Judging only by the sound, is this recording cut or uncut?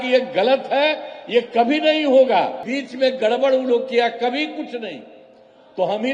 cut